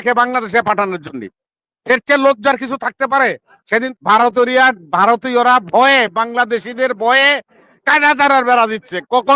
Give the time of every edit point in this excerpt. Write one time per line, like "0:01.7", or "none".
0:03.9